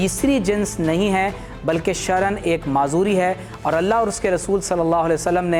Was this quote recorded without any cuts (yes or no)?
yes